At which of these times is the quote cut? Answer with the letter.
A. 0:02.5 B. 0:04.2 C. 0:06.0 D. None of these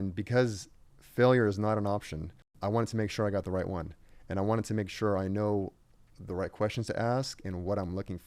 A